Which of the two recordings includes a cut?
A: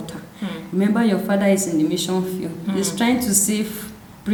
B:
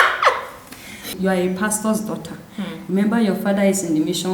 B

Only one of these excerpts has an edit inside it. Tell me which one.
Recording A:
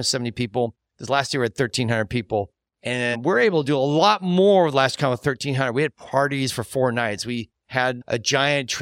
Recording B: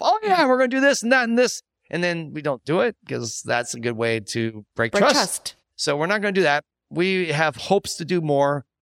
A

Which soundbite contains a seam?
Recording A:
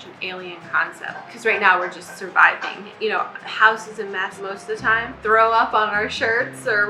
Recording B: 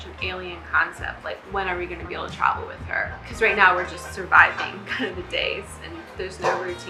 A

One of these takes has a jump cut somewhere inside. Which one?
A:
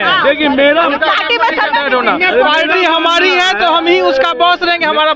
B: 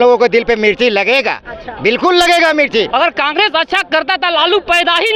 B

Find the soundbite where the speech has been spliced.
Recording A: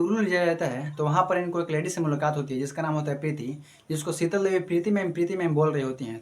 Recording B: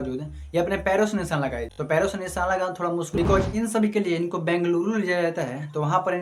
B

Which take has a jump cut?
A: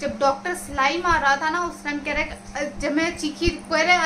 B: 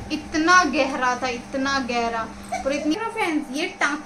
B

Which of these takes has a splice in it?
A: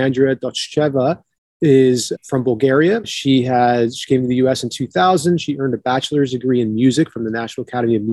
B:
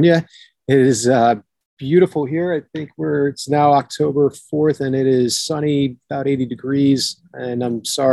A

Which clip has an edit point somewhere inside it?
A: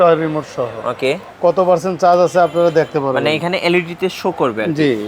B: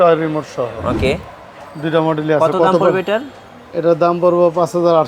A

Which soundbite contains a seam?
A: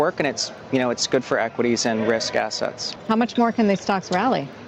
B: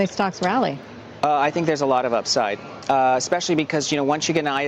B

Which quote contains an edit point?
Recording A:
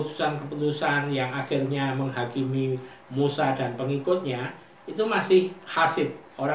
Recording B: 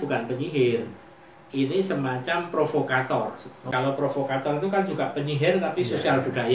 B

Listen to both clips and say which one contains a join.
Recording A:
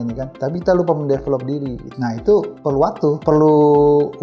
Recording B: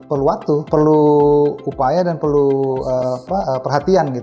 B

